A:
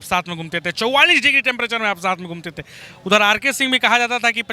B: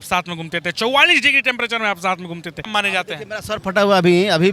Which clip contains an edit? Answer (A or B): B